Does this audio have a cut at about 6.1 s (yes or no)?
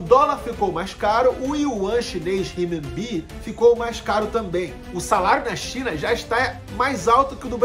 no